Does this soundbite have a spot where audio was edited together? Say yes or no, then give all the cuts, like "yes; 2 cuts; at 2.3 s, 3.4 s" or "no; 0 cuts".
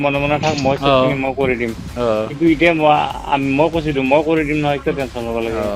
yes; 1 cut; at 1.9 s